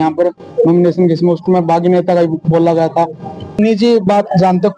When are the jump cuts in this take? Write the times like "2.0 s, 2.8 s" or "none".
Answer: 3.5 s